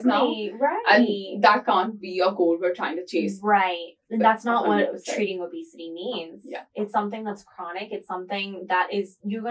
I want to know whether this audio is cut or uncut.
uncut